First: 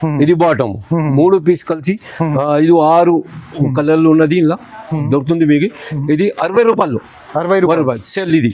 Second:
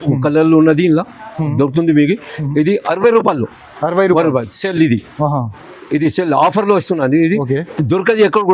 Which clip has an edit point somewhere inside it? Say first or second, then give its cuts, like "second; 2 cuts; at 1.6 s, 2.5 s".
first; 1 cut; at 2.3 s